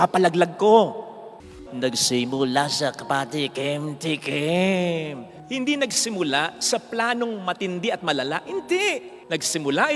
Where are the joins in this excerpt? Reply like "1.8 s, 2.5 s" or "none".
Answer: 1.5 s